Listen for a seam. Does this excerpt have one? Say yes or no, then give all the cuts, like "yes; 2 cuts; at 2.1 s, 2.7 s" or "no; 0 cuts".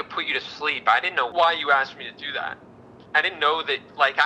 yes; 1 cut; at 1.3 s